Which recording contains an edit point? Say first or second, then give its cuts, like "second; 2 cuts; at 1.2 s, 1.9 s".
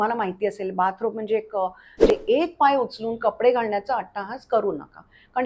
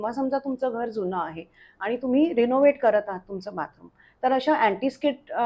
first; 1 cut; at 2.1 s